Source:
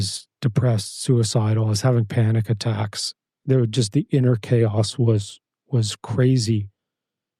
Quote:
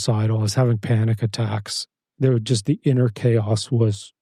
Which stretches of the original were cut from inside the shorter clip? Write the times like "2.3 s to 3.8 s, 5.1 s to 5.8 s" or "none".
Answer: none